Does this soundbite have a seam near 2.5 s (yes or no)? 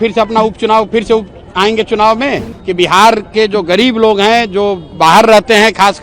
yes